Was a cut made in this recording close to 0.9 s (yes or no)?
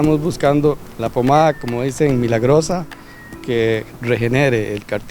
yes